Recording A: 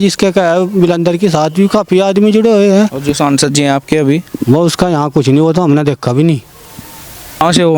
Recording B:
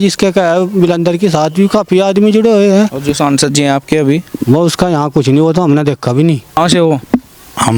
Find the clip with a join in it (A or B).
B